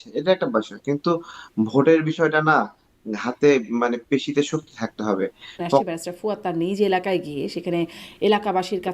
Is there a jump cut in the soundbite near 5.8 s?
yes; 1 cut; at 5.8 s

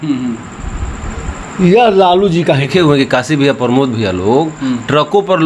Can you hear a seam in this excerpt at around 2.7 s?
yes; 1 cut; at 2.7 s

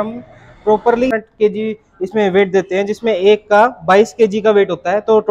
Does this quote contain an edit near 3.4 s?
no; 1 cut; at 1.1 s

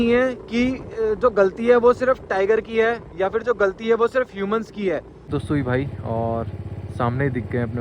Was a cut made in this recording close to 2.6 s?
no; 1 cut; at 5.3 s

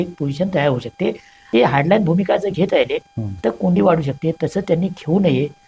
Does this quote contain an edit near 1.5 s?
yes; 1 cut; at 1.5 s

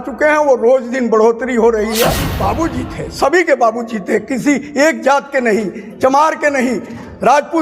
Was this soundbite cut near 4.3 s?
no; 1 cut; at 2.3 s

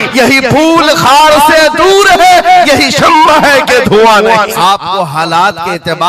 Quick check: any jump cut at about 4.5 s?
yes; 1 cut; at 4.5 s

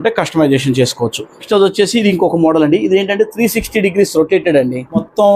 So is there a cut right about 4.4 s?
no; 1 cut; at 1.3 s

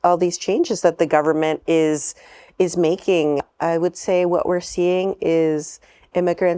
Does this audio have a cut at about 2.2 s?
no; 1 cut; at 3.5 s

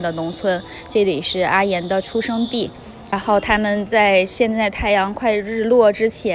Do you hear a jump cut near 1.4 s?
no; 1 cut; at 3.1 s

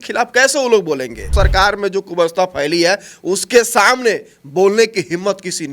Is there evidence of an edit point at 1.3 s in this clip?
yes; 1 cut; at 1.3 s

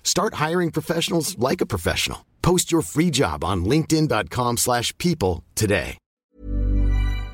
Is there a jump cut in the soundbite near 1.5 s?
no; 1 cut; at 6.3 s

